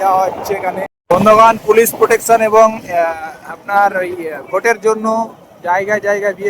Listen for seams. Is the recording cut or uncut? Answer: cut